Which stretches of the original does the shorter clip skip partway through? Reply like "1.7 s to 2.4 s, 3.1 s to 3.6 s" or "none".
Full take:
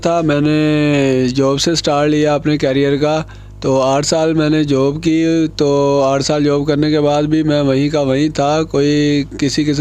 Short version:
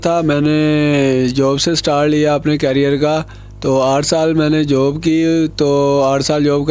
none